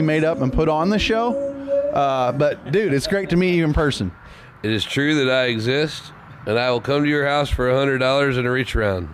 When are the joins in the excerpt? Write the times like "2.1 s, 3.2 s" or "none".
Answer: none